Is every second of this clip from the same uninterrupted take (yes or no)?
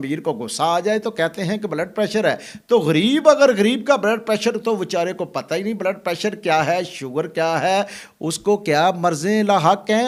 yes